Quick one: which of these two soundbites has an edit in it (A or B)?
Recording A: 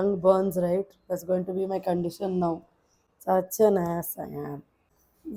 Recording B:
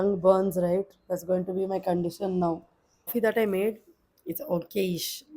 B